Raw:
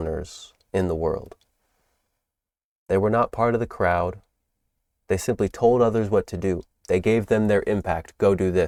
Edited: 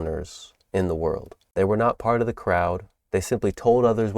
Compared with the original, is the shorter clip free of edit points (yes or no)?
no